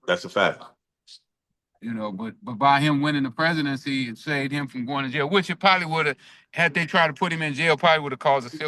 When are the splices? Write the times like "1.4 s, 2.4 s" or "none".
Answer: none

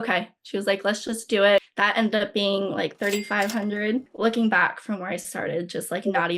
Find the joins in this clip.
1.7 s, 4.1 s

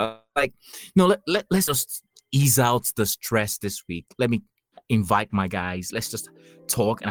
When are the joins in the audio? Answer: none

